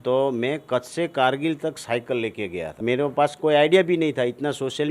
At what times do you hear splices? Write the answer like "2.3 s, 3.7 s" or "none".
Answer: 2.8 s